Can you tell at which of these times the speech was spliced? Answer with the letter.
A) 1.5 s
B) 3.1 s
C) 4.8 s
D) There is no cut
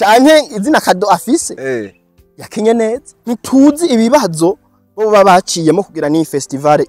B